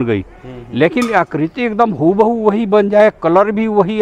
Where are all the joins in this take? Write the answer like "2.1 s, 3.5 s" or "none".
none